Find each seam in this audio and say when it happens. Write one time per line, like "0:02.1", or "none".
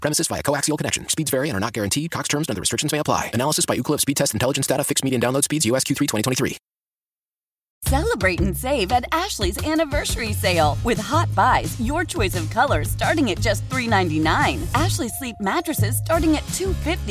0:07.6